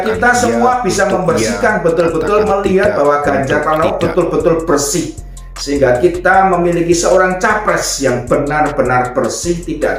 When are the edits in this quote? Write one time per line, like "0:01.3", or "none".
none